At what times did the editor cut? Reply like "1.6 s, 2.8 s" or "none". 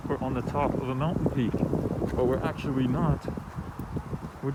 none